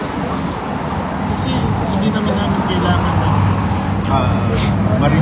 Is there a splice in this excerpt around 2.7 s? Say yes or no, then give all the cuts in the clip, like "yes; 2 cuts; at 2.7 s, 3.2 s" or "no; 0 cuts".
no; 0 cuts